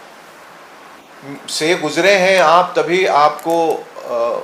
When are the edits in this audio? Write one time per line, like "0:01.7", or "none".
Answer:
none